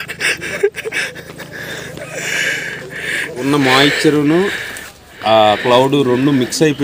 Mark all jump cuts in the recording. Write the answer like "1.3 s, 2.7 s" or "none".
3.4 s

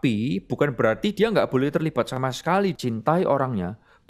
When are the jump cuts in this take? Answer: 2.7 s

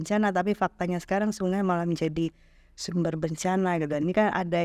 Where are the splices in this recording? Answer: none

